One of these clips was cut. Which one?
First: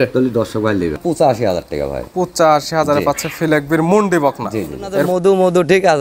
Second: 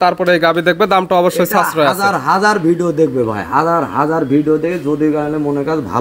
first; 2 cuts; at 1.0 s, 5.1 s

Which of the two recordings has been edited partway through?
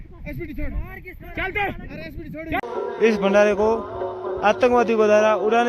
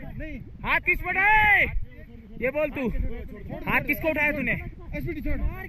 first; 1 cut; at 2.7 s

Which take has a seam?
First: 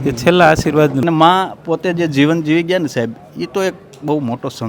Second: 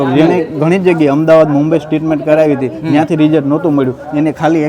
first; 1 cut; at 1.0 s

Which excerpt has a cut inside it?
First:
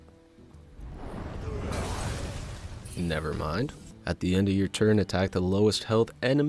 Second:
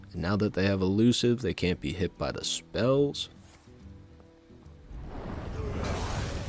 first; 1 cut; at 3.8 s

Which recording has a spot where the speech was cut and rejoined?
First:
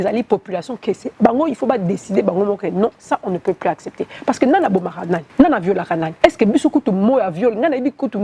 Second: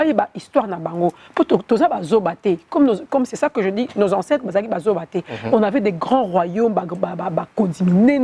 first; 2 cuts; at 5.3 s, 6.1 s

